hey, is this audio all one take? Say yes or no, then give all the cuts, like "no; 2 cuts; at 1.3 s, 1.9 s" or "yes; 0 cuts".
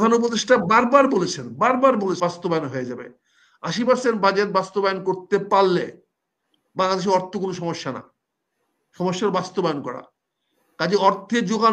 no; 1 cut; at 2.2 s